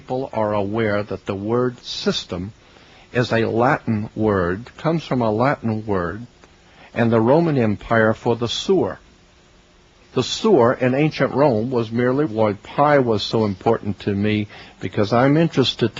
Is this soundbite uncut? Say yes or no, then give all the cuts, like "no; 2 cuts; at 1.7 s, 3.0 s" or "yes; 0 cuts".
yes; 0 cuts